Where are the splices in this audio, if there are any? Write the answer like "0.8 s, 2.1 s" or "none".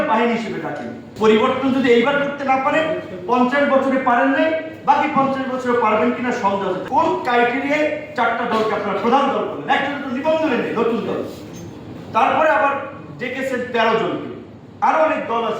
1.0 s, 6.8 s

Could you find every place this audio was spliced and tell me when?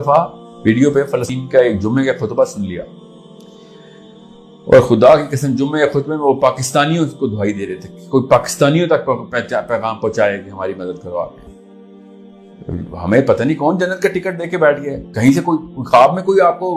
1.3 s, 11.4 s

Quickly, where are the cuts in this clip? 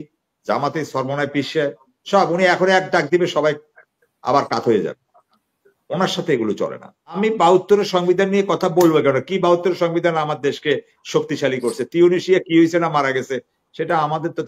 7.2 s

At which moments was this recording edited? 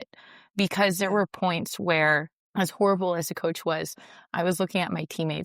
2.4 s

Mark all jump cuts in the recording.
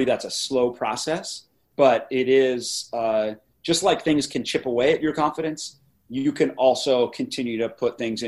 1.7 s

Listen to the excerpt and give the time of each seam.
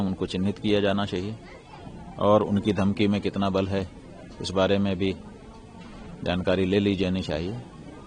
none

